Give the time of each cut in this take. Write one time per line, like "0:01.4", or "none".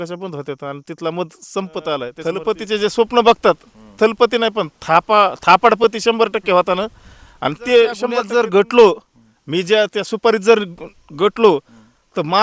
0:02.3
0:08.2